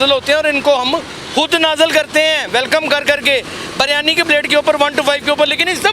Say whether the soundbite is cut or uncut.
uncut